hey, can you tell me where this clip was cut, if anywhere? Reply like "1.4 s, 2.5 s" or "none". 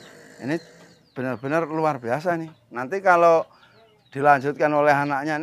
none